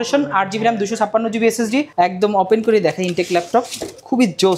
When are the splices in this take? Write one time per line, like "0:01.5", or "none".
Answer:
0:01.9